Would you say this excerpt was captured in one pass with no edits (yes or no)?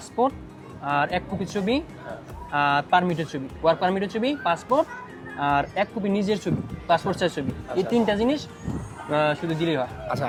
yes